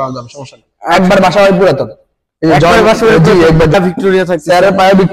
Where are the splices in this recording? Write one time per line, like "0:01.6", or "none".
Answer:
0:03.7